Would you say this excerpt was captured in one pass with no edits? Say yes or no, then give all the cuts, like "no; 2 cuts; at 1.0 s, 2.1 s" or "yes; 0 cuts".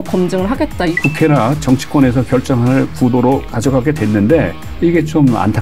no; 3 cuts; at 0.9 s, 3.5 s, 4.6 s